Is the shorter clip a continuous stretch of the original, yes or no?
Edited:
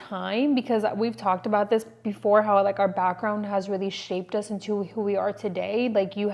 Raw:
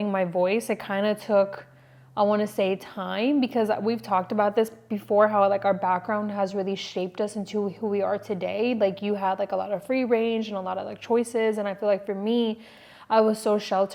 yes